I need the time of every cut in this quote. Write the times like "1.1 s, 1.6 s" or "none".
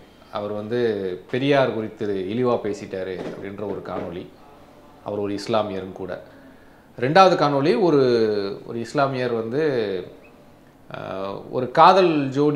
none